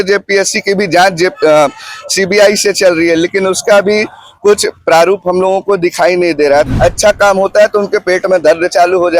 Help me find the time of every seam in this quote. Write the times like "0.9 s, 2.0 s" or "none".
6.7 s